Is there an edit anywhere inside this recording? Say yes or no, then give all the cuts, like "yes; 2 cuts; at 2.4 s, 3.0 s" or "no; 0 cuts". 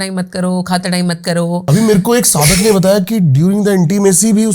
yes; 1 cut; at 1.7 s